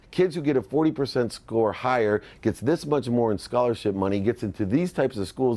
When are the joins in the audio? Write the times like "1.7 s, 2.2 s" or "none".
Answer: none